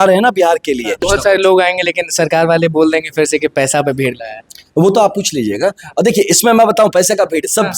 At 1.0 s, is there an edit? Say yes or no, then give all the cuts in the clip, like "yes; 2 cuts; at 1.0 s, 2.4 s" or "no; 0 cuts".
yes; 1 cut; at 1.0 s